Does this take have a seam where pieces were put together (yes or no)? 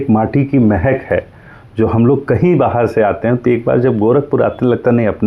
no